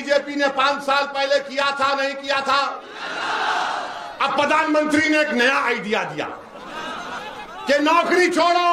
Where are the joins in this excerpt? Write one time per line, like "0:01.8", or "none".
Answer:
none